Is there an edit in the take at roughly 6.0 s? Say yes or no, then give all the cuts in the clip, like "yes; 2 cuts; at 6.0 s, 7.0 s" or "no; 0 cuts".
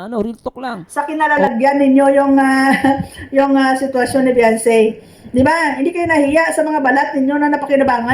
no; 1 cut; at 1.1 s